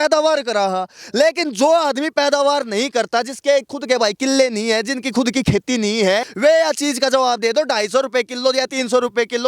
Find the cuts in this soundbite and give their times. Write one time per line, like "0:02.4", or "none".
0:06.3